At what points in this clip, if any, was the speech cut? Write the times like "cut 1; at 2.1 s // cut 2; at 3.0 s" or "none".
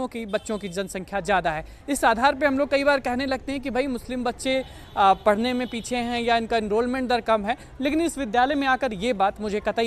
none